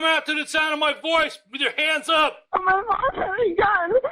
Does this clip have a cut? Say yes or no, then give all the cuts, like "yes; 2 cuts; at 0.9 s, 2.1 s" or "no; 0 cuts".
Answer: yes; 1 cut; at 2.5 s